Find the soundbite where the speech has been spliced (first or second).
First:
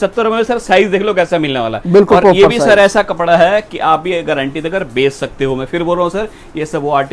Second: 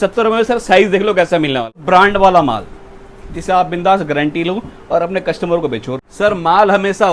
second